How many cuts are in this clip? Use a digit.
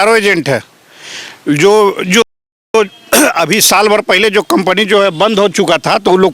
0